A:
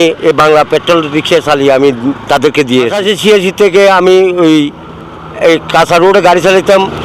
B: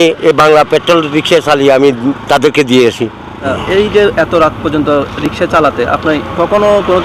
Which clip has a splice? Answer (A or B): A